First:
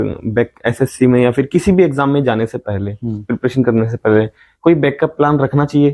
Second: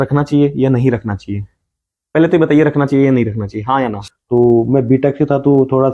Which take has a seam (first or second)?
second